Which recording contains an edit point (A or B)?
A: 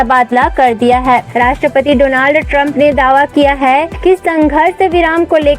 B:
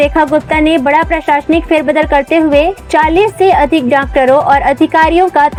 A